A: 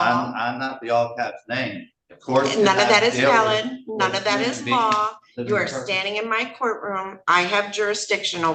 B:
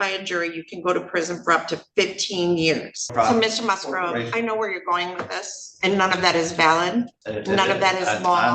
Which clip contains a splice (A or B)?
B